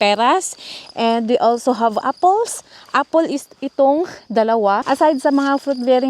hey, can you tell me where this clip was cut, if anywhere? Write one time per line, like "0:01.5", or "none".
0:04.8